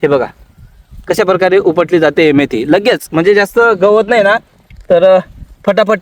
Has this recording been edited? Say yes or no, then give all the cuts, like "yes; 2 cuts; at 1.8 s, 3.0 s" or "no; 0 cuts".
no; 0 cuts